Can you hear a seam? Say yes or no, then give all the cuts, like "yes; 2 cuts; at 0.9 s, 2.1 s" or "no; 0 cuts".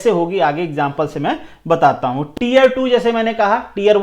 no; 0 cuts